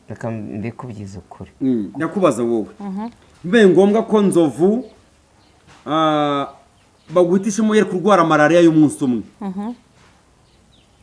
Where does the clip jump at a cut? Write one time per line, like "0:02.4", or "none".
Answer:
0:01.9

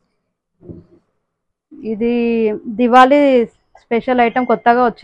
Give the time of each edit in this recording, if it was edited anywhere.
none

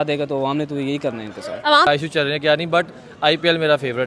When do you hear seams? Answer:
0:01.9

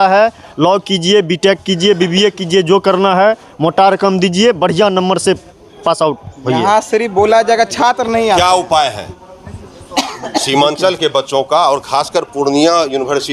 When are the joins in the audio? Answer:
none

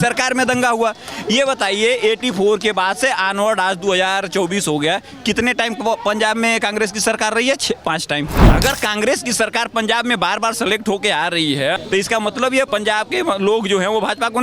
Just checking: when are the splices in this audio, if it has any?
0:08.4
0:11.8
0:12.7

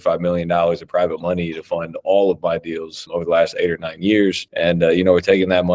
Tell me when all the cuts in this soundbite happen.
0:03.0
0:04.5

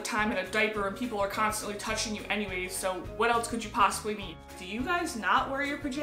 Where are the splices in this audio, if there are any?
0:04.4

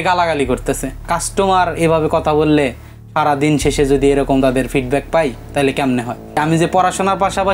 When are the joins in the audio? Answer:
0:01.1
0:06.4

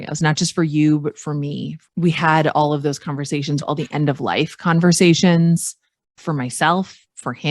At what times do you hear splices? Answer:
0:01.7
0:03.6
0:06.2

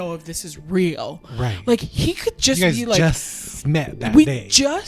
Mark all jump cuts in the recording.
none

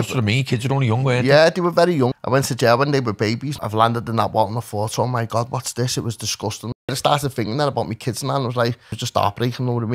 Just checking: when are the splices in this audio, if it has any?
0:02.1
0:03.5
0:06.9
0:08.9

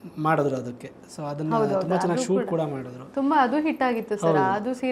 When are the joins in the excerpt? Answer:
none

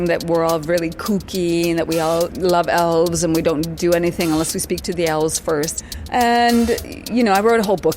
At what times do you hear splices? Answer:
0:02.3
0:05.8

